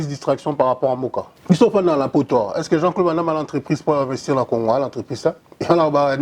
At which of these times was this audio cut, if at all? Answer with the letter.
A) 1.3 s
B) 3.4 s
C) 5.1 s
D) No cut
A